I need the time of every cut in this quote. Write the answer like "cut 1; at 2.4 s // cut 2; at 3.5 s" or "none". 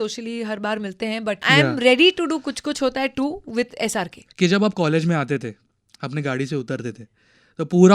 cut 1; at 1.4 s // cut 2; at 4.2 s